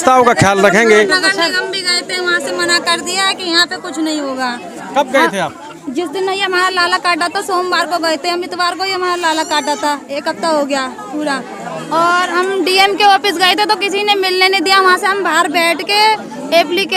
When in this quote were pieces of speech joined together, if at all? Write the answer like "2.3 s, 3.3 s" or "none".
1.5 s